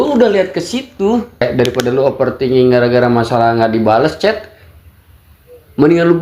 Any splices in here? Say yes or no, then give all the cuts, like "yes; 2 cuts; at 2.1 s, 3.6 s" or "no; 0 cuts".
yes; 1 cut; at 1.4 s